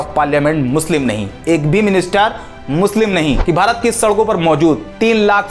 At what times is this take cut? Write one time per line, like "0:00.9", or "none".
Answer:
0:03.4